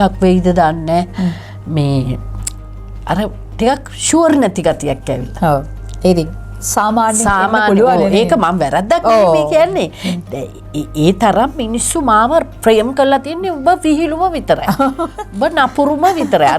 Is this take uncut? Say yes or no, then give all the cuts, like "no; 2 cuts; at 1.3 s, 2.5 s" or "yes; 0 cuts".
yes; 0 cuts